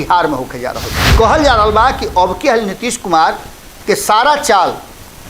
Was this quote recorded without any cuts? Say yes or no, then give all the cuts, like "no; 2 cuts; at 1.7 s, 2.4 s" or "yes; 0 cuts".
no; 1 cut; at 1.1 s